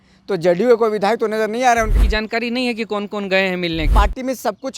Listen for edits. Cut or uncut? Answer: cut